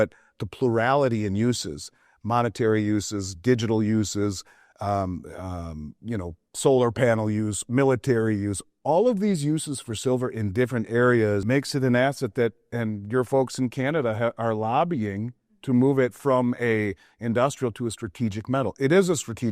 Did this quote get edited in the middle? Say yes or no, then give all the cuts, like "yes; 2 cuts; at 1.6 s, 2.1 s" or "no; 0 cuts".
yes; 1 cut; at 11.4 s